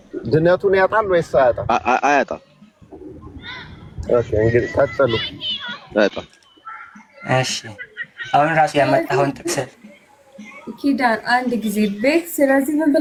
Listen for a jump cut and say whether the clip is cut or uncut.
uncut